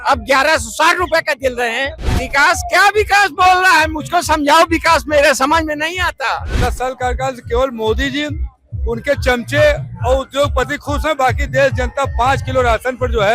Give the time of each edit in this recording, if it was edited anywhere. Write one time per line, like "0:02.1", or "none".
0:02.0
0:06.5